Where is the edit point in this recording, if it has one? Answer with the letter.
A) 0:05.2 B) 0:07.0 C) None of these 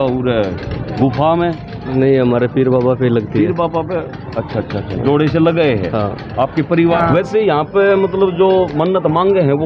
B